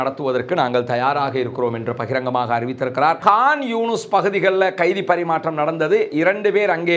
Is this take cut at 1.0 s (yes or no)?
no